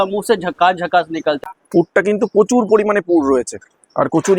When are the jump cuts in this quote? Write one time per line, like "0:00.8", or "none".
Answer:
0:01.4